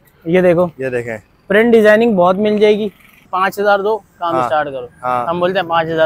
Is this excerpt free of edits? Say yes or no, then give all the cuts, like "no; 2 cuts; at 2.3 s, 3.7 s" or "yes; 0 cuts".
no; 1 cut; at 3.3 s